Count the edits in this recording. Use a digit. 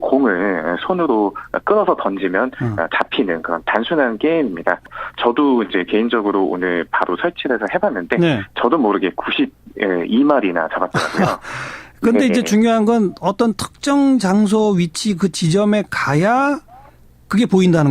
1